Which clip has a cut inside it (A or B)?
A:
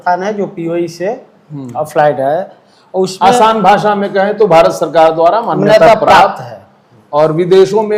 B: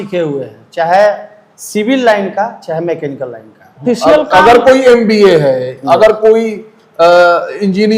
B